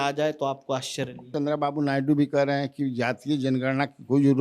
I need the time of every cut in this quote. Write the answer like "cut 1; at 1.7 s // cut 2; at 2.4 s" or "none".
cut 1; at 1.2 s